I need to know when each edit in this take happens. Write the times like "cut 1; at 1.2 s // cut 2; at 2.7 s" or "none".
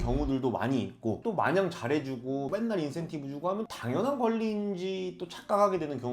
cut 1; at 2.5 s // cut 2; at 3.6 s